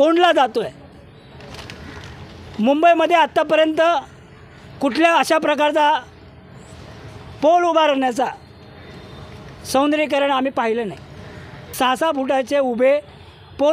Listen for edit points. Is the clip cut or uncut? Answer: cut